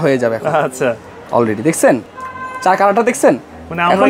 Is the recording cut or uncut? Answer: uncut